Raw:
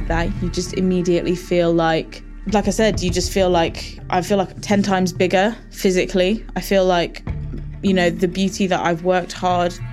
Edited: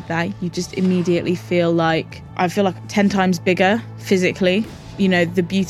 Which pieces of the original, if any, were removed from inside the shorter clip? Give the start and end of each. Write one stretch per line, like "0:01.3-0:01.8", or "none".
0:02.2-0:03.9
0:06.5-0:07.6